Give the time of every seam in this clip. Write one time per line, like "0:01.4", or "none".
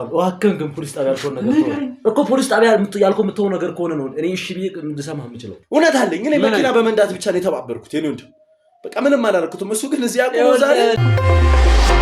0:05.5
0:11.0